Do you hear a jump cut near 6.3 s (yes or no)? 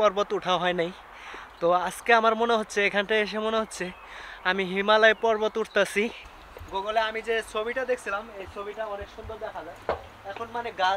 yes